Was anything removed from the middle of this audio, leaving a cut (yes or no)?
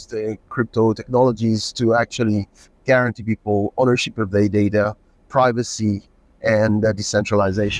no